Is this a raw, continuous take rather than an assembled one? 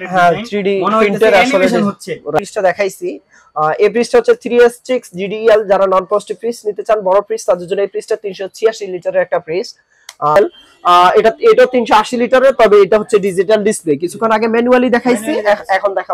no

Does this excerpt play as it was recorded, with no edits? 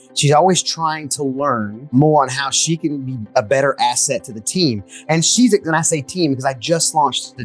yes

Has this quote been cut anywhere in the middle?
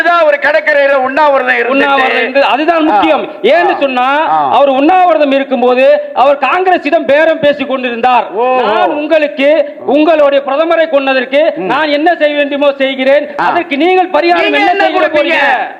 no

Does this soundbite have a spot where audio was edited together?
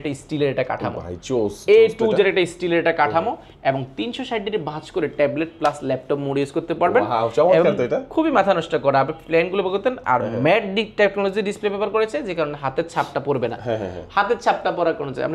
no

